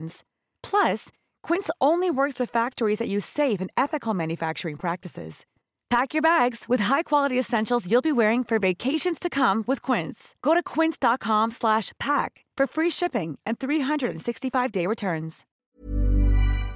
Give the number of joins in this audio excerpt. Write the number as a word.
one